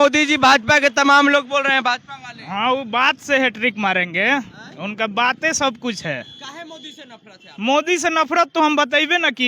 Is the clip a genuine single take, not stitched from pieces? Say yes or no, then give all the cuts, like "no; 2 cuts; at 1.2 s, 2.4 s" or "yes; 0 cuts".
yes; 0 cuts